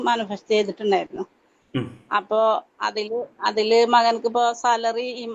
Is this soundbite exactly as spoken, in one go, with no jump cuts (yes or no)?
yes